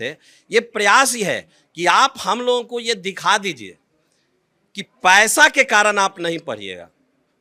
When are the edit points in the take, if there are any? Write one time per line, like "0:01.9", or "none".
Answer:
none